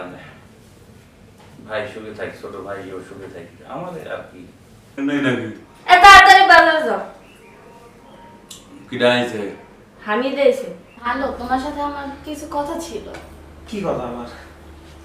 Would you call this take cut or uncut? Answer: cut